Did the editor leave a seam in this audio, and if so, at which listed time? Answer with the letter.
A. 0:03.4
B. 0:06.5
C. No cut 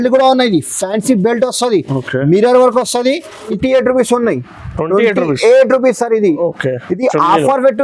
A